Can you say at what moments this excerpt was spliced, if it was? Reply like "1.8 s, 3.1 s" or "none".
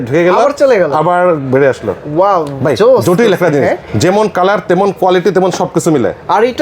none

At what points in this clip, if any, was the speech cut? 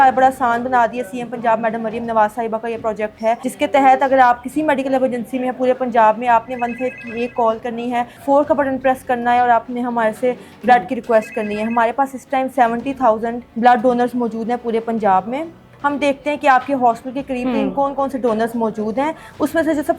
3.5 s, 8.1 s, 13.4 s, 15.7 s

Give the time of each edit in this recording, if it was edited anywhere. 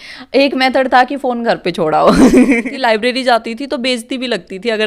2.6 s

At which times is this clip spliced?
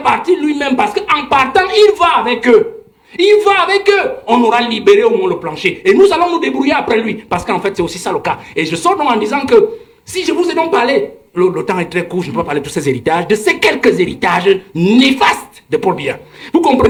none

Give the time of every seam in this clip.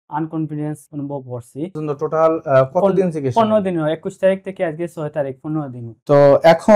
1.8 s

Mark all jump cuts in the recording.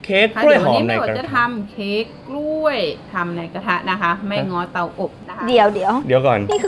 none

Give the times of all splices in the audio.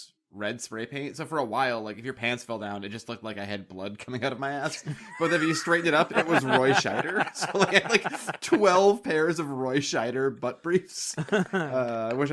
none

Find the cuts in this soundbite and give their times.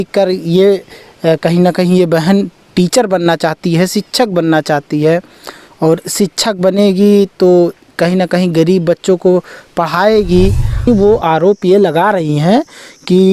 10.9 s

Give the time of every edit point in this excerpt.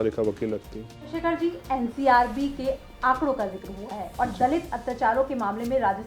1.1 s

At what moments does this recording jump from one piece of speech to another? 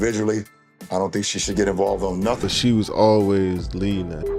2.4 s

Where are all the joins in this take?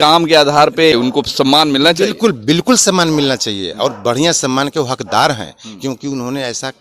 0.9 s

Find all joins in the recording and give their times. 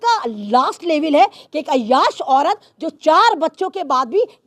none

